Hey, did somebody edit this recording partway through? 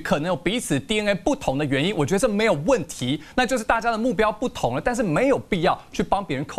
no; 0 cuts

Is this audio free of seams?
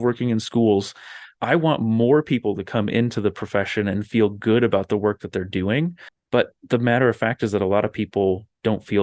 no; 1 cut; at 6.1 s

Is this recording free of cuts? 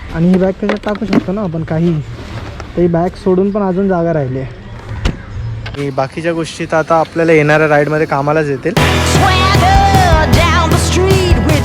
no; 2 cuts; at 5.7 s, 8.8 s

